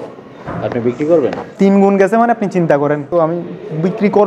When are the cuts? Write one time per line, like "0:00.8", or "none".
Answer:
0:01.4
0:03.1